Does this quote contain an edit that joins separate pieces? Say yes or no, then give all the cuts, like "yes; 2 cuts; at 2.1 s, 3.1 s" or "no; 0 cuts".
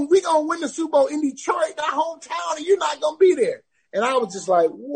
no; 0 cuts